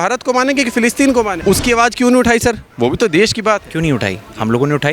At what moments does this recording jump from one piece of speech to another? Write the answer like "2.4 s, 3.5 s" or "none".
1.3 s

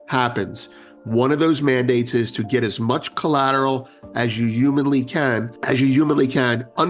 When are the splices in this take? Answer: 5.5 s

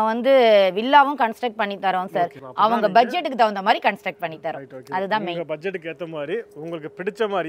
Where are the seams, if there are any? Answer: 2.4 s

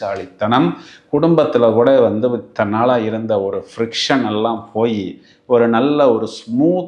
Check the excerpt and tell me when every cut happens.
none

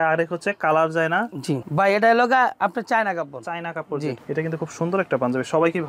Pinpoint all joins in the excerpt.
1.6 s, 4.2 s

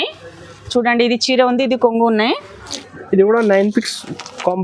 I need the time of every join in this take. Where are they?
2.5 s

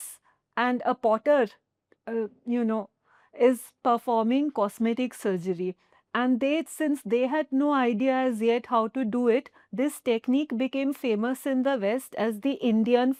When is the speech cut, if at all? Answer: none

